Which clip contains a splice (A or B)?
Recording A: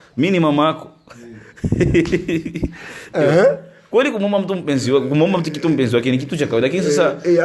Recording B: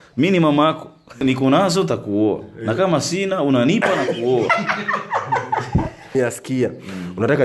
B